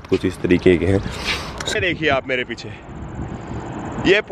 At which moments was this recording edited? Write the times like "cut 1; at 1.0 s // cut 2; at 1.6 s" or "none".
cut 1; at 1.8 s